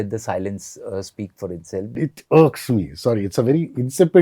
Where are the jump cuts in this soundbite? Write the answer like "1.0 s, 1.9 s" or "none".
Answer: 2.0 s

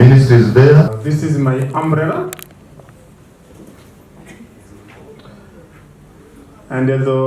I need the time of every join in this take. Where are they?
1.0 s

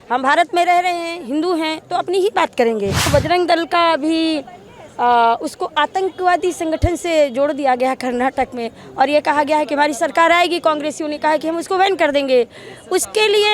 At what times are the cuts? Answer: 3.1 s

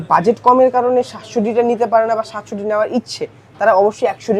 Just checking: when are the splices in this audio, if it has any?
none

